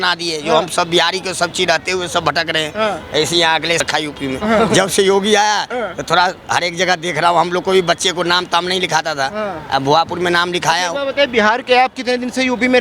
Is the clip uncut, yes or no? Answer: no